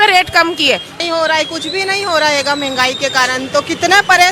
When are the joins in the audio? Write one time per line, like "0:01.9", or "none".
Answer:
0:01.0